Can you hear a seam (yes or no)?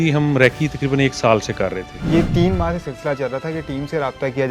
yes